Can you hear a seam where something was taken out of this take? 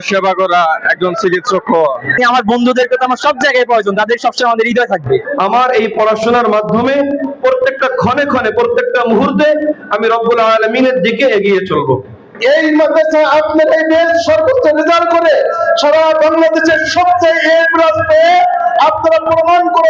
yes; 3 cuts; at 2.2 s, 5.2 s, 12.3 s

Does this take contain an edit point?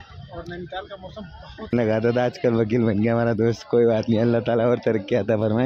yes; 1 cut; at 1.7 s

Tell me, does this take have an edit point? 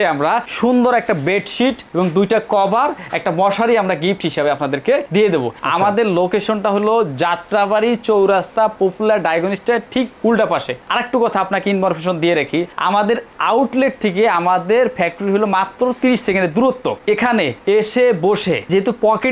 no; 0 cuts

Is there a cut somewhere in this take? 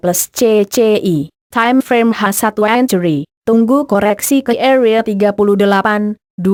no; 0 cuts

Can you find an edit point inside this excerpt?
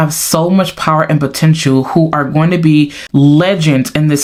no; 0 cuts

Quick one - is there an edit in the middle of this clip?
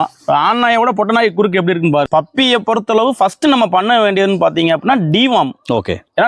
yes; 1 cut; at 2.1 s

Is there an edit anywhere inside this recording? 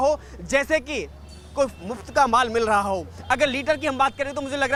no; 0 cuts

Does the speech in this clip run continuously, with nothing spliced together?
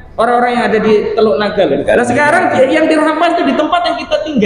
no; 1 cut; at 1.8 s

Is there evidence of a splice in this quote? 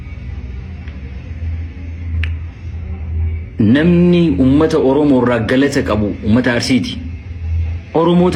no; 0 cuts

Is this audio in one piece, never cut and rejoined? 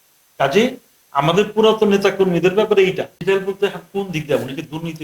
no; 1 cut; at 3.1 s

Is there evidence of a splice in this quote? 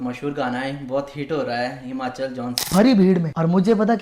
yes; 1 cut; at 2.5 s

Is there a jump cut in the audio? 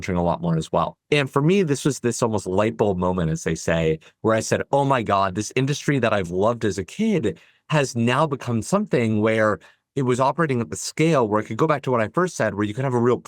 yes; 1 cut; at 1.0 s

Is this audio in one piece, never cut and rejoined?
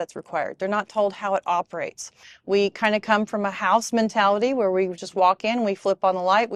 yes; 0 cuts

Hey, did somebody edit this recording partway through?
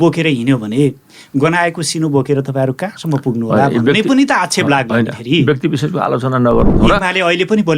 yes; 1 cut; at 6.7 s

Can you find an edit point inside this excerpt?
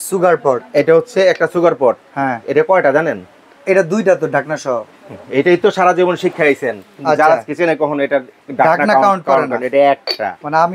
no; 0 cuts

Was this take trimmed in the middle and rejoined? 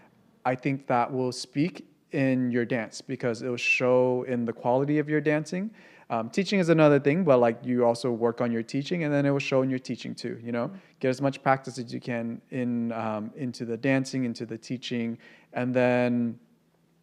no; 0 cuts

